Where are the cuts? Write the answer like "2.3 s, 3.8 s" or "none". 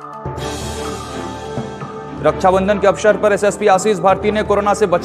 1.9 s